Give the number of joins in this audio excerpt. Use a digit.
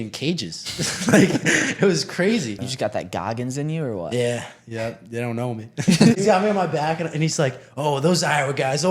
2